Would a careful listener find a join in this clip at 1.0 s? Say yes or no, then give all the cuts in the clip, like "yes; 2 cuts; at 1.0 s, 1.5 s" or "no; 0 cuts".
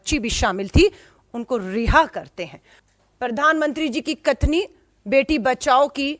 no; 1 cut; at 2.7 s